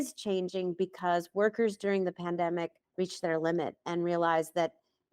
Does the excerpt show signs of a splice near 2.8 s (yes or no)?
yes